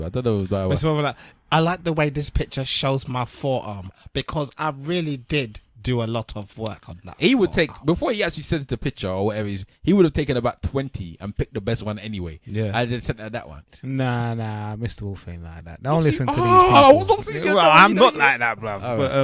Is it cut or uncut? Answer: cut